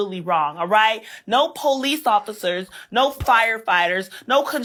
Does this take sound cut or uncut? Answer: uncut